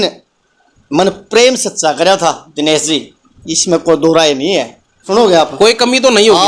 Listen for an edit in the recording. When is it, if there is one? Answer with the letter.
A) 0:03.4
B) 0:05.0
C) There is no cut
B